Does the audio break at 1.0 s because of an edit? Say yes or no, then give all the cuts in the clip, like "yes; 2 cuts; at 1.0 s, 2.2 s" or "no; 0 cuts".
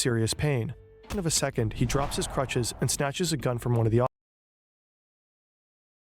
yes; 1 cut; at 1.0 s